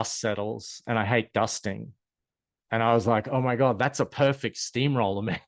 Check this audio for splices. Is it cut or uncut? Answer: uncut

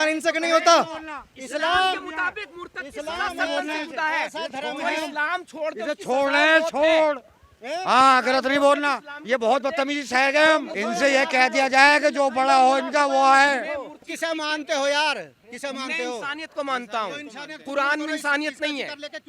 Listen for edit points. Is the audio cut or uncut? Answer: cut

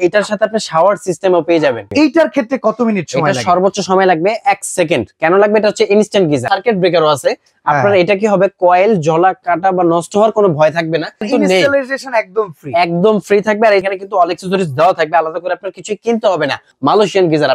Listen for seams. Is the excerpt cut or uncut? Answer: cut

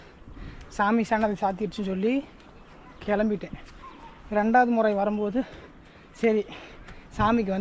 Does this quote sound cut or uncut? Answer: uncut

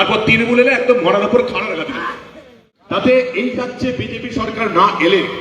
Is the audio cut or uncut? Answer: cut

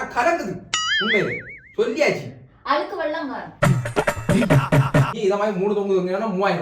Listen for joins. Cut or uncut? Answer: cut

